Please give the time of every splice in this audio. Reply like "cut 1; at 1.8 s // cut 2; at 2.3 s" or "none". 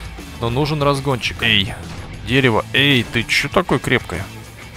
cut 1; at 1.3 s